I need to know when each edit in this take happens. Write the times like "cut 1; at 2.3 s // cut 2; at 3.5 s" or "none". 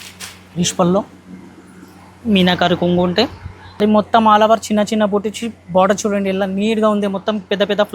cut 1; at 3.8 s